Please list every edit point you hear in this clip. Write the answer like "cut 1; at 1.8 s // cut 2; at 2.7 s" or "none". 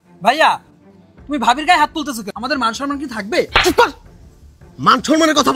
cut 1; at 2.3 s